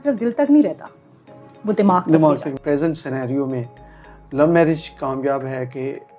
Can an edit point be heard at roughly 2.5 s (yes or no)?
yes